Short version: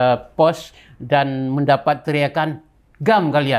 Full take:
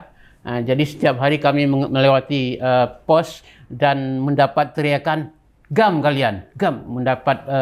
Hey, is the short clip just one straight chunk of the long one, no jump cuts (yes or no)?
yes